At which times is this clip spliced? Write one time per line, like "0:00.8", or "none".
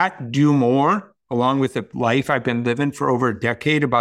0:01.9